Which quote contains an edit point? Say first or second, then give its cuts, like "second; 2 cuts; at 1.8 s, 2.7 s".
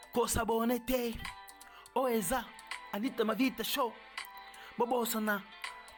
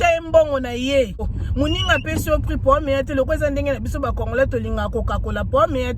second; 1 cut; at 1.4 s